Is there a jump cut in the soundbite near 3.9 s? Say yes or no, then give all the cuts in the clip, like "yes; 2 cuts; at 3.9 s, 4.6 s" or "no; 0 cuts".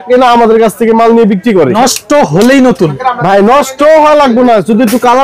no; 1 cut; at 1.7 s